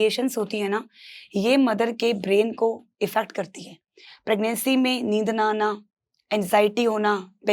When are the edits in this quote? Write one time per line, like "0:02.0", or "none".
none